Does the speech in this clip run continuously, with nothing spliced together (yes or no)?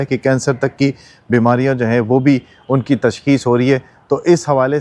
yes